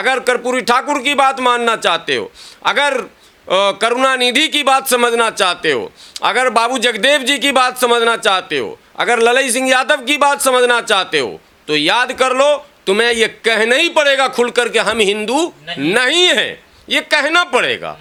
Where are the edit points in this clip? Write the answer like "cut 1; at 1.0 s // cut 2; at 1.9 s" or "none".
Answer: none

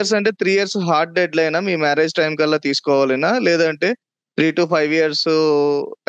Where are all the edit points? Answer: none

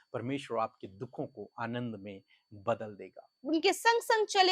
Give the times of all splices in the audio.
cut 1; at 3.4 s

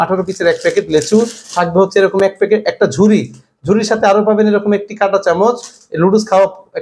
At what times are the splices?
none

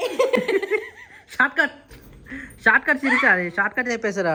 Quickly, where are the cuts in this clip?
none

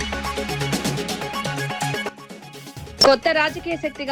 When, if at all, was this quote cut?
cut 1; at 2.0 s

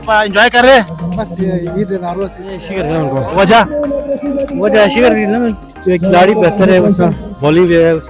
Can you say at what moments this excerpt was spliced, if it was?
cut 1; at 2.7 s

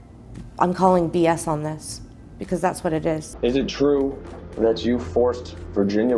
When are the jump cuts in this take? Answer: none

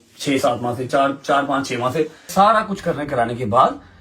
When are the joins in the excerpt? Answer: cut 1; at 2.3 s

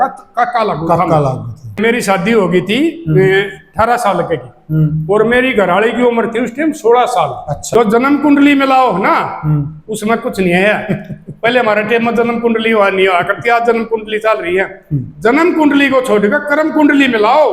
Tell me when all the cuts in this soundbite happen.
cut 1; at 1.8 s // cut 2; at 7.5 s

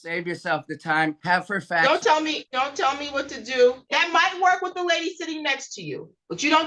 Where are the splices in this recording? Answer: cut 1; at 1.2 s // cut 2; at 2.4 s // cut 3; at 3.8 s

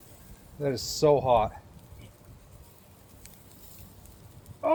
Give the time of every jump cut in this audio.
none

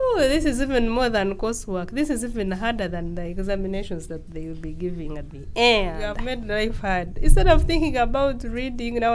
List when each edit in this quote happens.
cut 1; at 6.2 s

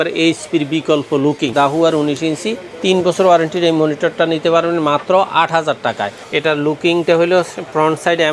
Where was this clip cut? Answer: cut 1; at 1.5 s // cut 2; at 6.1 s

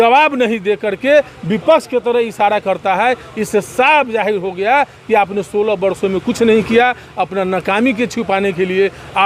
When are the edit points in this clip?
none

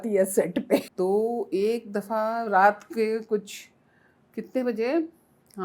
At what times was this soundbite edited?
cut 1; at 0.9 s

